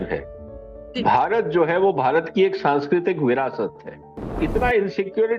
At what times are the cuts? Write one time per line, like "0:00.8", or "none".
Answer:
0:04.3